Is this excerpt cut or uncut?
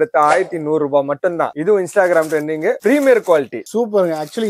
uncut